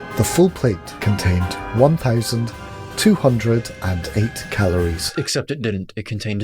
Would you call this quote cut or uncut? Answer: cut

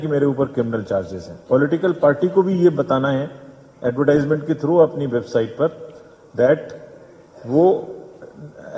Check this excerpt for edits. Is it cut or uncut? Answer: uncut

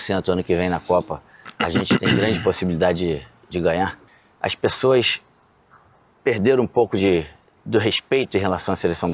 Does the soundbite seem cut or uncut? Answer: cut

